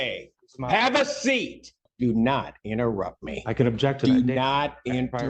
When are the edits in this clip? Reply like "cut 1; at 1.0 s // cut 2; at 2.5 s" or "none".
cut 1; at 1.9 s

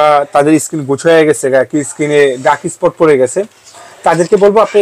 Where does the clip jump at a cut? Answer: none

